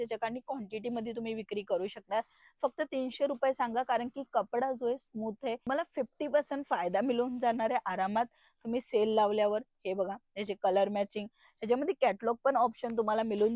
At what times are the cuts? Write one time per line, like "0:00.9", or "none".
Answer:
none